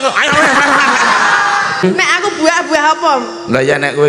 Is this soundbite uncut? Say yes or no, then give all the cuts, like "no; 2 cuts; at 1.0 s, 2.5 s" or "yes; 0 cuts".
no; 1 cut; at 1.8 s